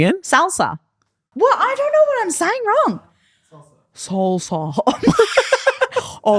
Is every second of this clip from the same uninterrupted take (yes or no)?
no